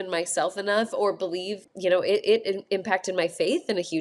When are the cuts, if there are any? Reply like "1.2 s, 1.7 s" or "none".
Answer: 1.6 s